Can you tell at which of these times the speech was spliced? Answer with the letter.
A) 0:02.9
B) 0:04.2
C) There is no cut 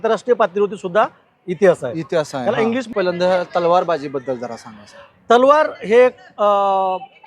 A